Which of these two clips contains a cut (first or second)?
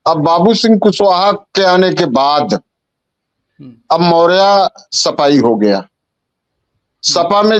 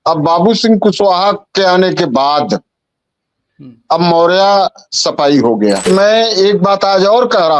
second